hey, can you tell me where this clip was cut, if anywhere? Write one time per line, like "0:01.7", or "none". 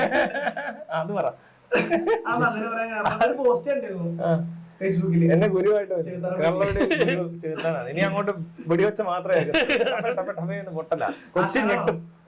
none

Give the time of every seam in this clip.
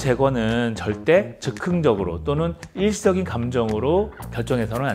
none

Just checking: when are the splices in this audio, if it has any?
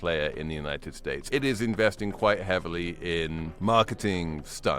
0:01.1
0:03.5

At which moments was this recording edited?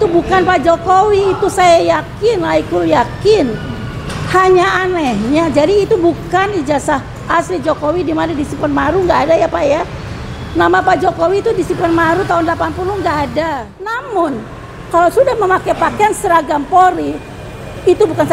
0:14.0

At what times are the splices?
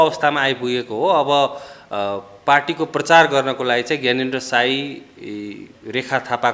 none

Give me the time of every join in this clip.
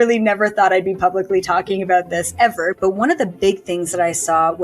0:02.8

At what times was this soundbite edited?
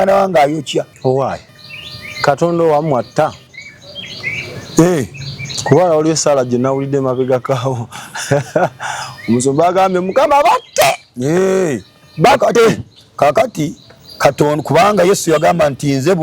0:00.9

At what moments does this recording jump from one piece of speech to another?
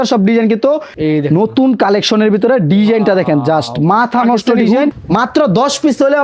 0:00.9
0:04.9

